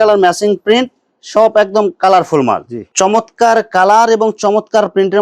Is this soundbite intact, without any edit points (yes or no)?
no